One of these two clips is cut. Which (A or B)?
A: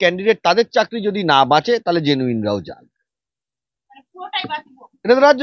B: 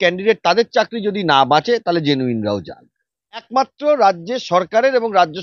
B